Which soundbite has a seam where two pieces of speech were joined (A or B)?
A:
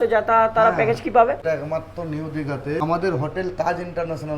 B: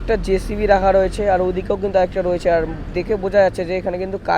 A